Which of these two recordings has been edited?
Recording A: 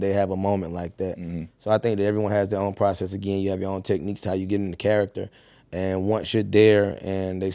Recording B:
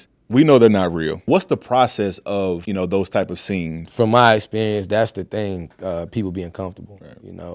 B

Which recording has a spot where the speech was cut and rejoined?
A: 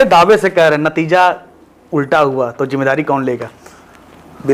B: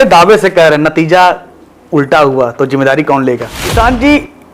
B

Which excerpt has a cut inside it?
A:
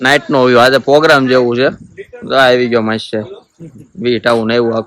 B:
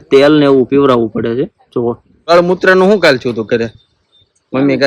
B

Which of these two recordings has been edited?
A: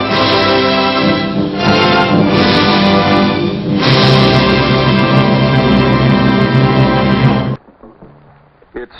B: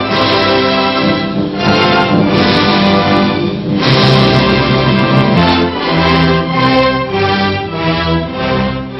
A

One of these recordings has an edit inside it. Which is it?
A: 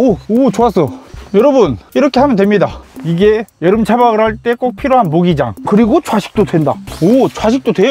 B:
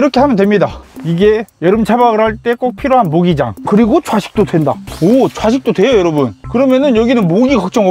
A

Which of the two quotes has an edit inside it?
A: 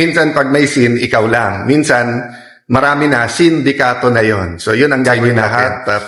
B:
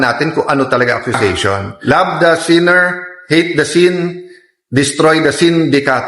B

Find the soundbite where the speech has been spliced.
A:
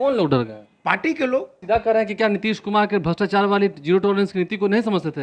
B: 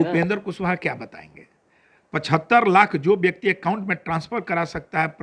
A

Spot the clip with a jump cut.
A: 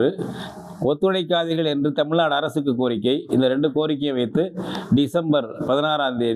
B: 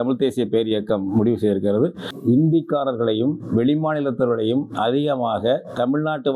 B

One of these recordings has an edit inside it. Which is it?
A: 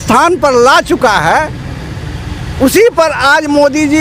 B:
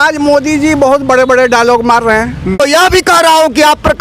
B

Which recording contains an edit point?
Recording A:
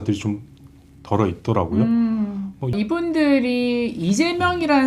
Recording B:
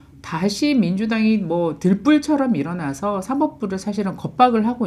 A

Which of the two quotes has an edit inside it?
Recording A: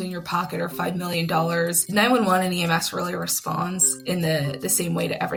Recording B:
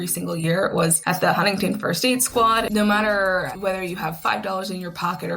B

